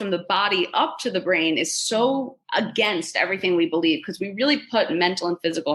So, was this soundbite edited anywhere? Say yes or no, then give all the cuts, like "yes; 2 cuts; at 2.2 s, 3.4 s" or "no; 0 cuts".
yes; 1 cut; at 2.4 s